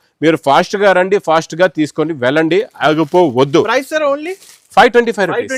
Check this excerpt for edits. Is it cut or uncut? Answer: uncut